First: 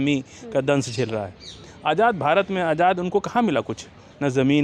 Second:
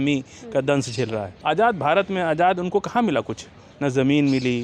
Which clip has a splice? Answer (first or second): second